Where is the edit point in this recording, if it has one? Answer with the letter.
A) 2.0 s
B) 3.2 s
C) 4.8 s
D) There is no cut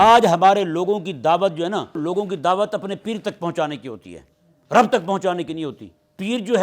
A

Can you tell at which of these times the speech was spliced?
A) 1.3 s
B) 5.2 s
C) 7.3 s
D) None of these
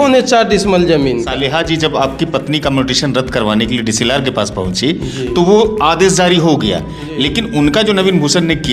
A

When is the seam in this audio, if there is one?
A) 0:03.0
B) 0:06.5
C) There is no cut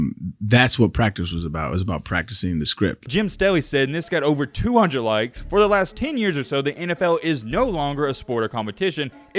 A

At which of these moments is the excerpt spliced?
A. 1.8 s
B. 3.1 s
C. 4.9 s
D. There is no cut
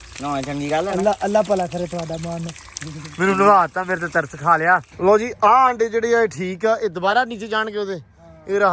C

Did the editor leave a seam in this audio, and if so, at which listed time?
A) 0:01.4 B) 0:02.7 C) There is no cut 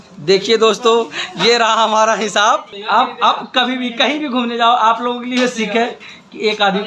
B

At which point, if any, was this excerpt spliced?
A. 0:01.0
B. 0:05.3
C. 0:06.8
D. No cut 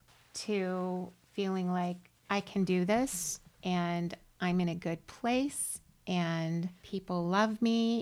C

